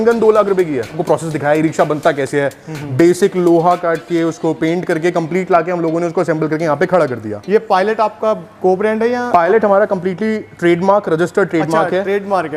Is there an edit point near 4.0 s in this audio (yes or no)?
no